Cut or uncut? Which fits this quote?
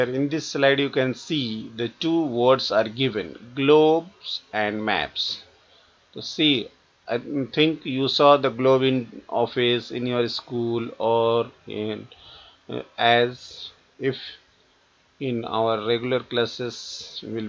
uncut